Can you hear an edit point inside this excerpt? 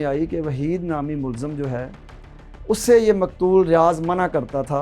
no; 0 cuts

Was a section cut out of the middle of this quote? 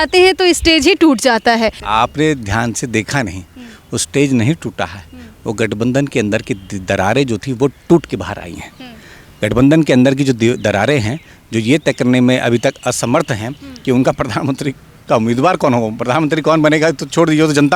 yes; 1 cut; at 1.8 s

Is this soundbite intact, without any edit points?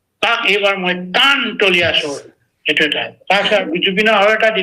no; 1 cut; at 3.6 s

